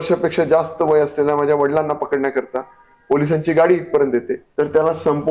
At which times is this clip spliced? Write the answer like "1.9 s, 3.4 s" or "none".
4.4 s